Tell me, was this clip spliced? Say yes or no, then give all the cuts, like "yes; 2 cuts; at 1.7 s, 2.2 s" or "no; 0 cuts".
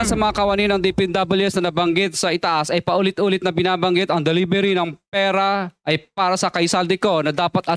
no; 0 cuts